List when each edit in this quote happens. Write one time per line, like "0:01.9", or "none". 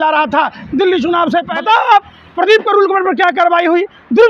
0:01.5

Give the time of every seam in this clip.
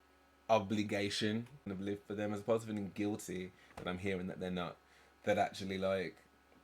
0:01.7

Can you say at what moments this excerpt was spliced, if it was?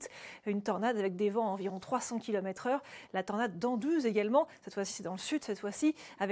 0:03.0

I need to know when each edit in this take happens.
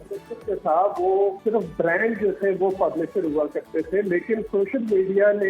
0:01.4

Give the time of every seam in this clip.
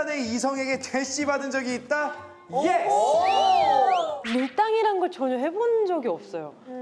0:04.1

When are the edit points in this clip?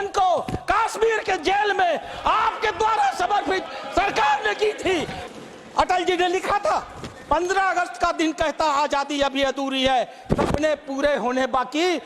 0:05.2

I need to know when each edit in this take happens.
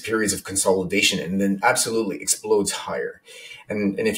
none

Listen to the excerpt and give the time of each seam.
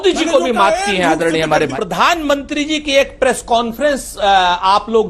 0:01.7

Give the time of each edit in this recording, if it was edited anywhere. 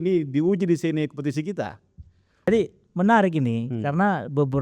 0:02.5

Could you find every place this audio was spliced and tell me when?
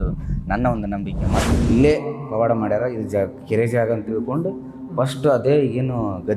0:01.5

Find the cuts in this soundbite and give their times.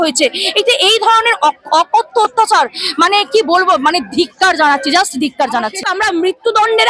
0:05.8

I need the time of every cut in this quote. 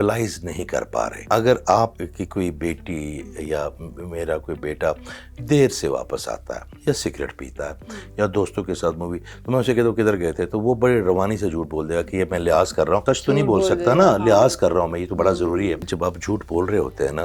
0:01.2
0:02.0
0:13.0
0:15.9

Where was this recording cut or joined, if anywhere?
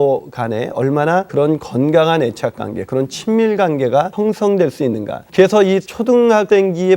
0:01.3
0:04.1
0:05.1
0:06.3

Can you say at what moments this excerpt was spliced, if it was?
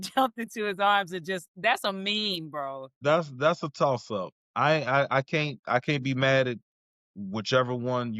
0:03.0

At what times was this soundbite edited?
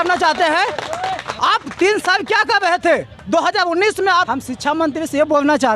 0:04.1

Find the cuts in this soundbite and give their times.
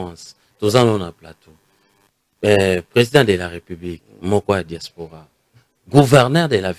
none

